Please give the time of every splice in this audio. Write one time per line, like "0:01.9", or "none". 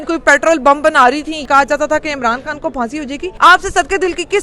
0:01.4
0:03.2